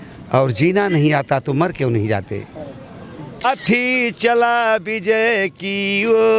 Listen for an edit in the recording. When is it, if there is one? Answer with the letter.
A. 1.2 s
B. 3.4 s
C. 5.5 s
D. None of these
B